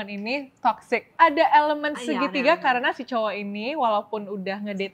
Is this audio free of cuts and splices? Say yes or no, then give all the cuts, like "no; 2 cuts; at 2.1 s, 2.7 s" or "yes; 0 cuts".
no; 1 cut; at 1.1 s